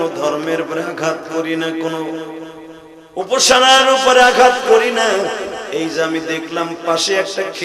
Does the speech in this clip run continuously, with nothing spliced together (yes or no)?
yes